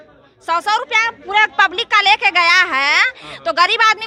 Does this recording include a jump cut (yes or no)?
no